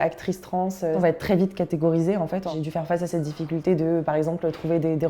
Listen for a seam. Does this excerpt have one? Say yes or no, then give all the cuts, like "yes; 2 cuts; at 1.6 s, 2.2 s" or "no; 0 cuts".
yes; 2 cuts; at 1.0 s, 2.5 s